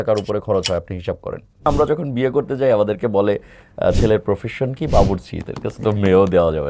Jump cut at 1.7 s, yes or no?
yes